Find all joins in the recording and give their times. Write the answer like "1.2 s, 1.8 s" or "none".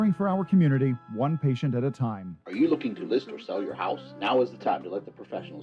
2.4 s